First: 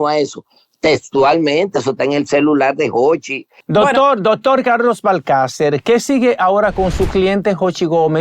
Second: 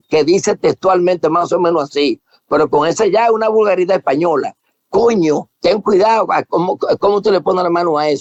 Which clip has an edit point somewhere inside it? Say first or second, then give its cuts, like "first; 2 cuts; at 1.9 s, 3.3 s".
first; 1 cut; at 3.6 s